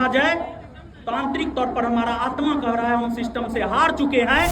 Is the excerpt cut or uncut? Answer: uncut